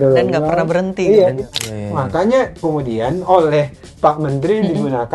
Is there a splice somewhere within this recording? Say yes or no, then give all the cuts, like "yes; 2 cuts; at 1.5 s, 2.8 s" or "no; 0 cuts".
yes; 1 cut; at 1.5 s